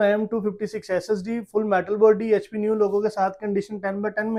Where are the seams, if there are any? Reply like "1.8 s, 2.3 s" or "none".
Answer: none